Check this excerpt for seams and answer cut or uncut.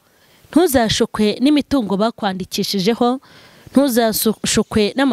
uncut